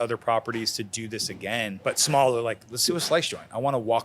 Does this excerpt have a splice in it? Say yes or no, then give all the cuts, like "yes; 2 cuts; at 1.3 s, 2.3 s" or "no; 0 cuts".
yes; 2 cuts; at 1.8 s, 2.7 s